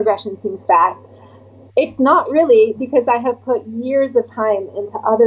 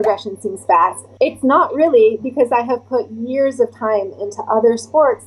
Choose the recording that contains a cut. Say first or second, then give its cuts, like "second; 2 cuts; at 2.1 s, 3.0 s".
second; 1 cut; at 1.0 s